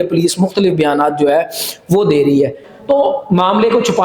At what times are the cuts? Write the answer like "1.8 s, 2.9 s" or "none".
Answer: 2.7 s